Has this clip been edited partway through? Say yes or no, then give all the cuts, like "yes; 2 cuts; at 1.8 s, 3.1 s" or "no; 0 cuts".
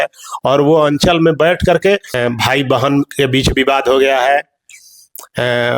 yes; 1 cut; at 2.2 s